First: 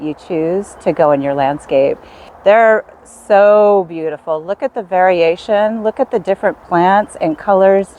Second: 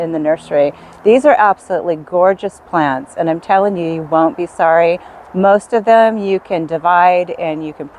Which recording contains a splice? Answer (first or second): first